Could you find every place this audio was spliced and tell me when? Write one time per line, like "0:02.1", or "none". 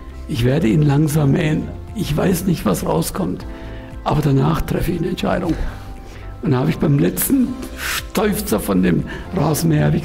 none

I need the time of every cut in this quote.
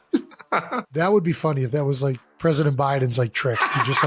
0:00.9
0:02.3

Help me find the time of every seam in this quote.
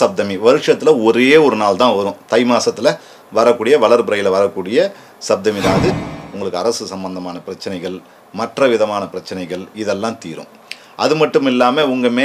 0:05.9

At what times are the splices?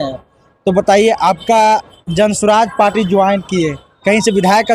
none

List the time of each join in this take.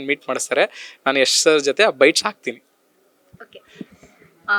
none

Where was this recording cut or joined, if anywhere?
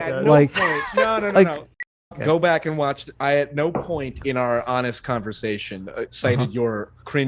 0:01.7

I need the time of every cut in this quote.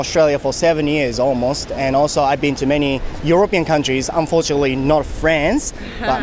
none

